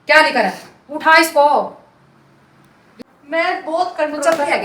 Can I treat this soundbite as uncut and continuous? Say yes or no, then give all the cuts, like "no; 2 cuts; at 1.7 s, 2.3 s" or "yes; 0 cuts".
no; 1 cut; at 3.0 s